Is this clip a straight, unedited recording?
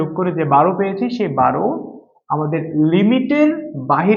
yes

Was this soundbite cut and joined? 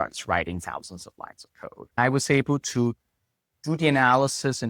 yes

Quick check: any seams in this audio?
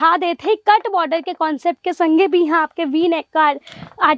no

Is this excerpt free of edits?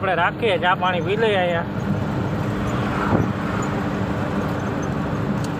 yes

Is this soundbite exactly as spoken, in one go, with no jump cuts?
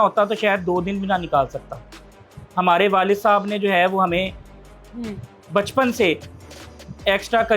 yes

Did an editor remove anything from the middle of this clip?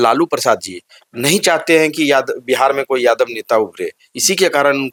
no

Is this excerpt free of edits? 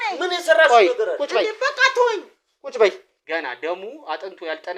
no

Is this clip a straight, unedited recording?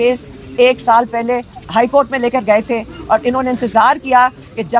no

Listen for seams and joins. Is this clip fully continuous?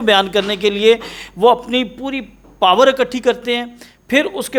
yes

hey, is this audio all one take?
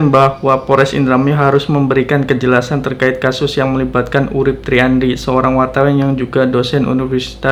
yes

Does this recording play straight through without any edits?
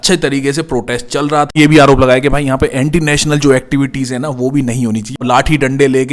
no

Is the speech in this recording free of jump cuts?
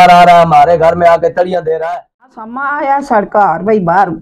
no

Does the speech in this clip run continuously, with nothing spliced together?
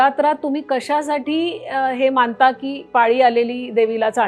yes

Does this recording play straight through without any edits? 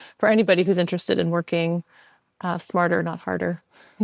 yes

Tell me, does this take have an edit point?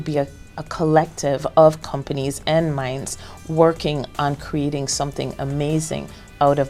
no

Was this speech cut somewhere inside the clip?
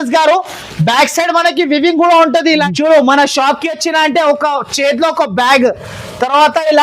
yes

